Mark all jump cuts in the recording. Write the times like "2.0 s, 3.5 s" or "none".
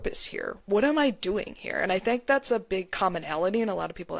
none